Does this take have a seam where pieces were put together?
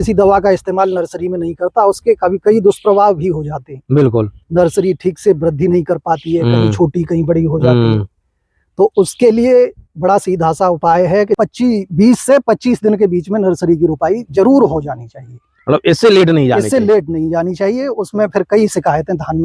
yes; 1 cut; at 11.4 s

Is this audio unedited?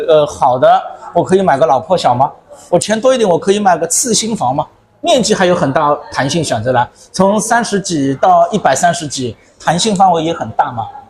yes; 0 cuts

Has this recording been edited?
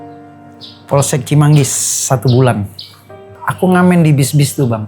yes; 1 cut; at 3.4 s

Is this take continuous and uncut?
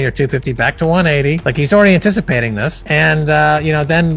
yes; 0 cuts

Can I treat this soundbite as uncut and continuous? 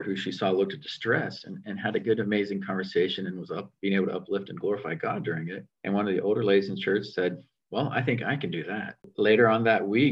no; 3 cuts; at 5.7 s, 7.5 s, 9.1 s

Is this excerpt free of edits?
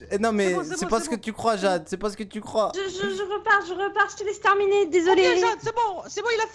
yes; 0 cuts

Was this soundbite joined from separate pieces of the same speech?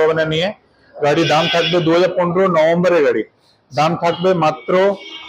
no; 0 cuts

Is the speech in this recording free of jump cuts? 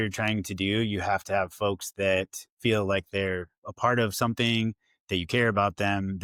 yes; 0 cuts

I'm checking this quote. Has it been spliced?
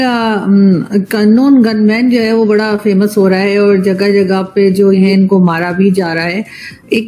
yes; 1 cut; at 5.0 s

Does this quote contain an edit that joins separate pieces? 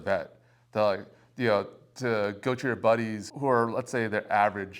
yes; 1 cut; at 3.2 s

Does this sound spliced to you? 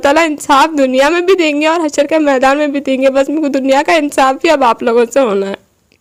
no; 0 cuts

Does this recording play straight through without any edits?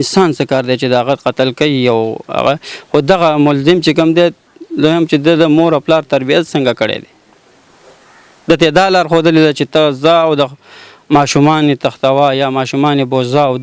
yes; 0 cuts

